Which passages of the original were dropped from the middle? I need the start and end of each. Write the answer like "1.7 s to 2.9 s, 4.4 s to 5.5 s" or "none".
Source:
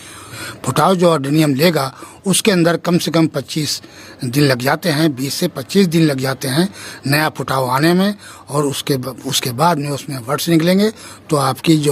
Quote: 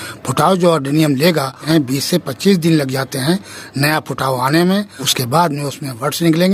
2.0 s to 5.0 s, 8.3 s to 9.3 s